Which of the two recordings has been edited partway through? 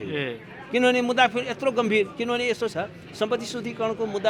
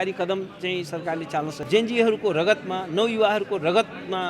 second; 1 cut; at 1.6 s

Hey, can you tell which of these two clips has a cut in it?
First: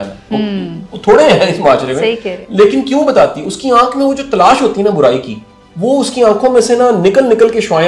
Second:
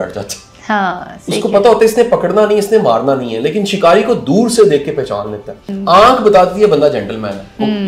second; 1 cut; at 5.7 s

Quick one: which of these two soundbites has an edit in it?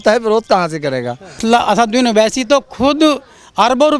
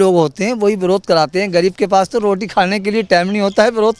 first; 1 cut; at 1.4 s

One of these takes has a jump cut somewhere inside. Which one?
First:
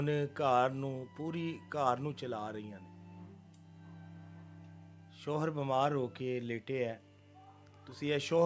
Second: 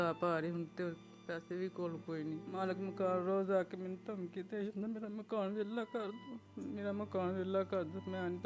second; 1 cut; at 2.4 s

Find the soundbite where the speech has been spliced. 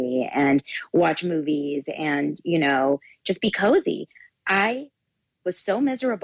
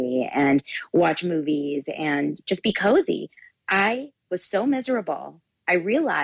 second; 2 cuts; at 2.4 s, 4.1 s

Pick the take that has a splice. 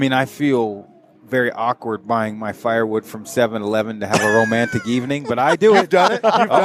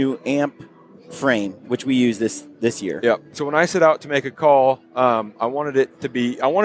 second; 1 cut; at 3.3 s

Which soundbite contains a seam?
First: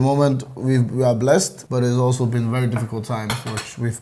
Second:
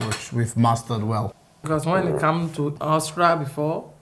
second; 2 cuts; at 1.5 s, 2.8 s

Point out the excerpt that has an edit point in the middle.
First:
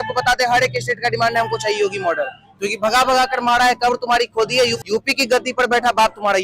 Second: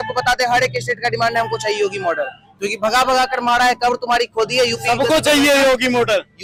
first; 1 cut; at 4.8 s

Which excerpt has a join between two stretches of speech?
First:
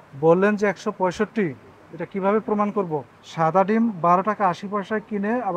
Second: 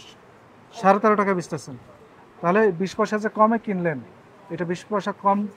first; 1 cut; at 3.1 s

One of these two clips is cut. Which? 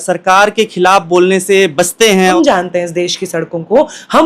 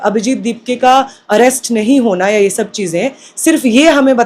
first; 1 cut; at 2.3 s

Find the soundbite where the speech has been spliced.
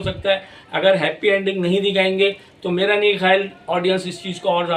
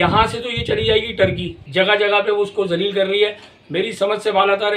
second; 1 cut; at 1.5 s

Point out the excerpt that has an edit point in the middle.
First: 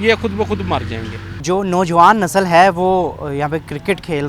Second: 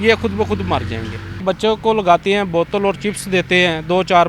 second; 1 cut; at 1.4 s

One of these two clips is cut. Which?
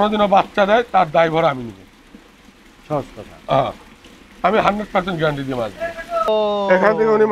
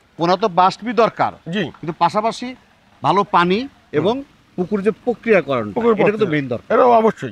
first; 1 cut; at 6.3 s

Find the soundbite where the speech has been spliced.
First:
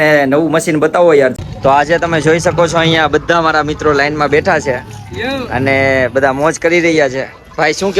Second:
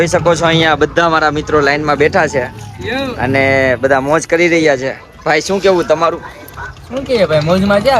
first; 1 cut; at 1.3 s

